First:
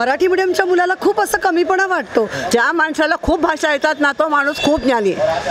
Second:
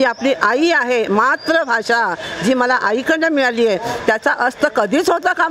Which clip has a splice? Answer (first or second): first